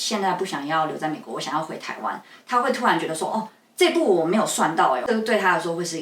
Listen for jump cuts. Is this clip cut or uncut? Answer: cut